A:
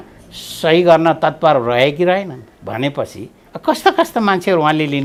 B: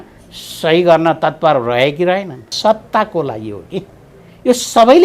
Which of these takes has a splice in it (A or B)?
B